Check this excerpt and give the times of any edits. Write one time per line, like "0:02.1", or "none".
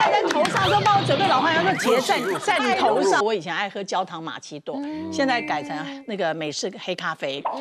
0:03.2